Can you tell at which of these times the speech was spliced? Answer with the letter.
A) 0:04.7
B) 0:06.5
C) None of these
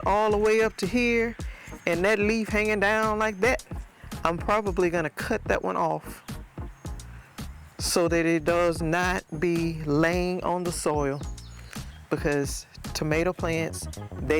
C